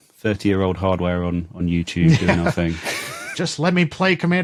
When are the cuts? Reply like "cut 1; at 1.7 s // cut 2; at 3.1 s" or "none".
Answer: none